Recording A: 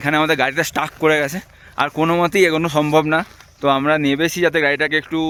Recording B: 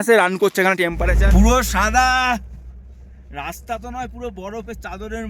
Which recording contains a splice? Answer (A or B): B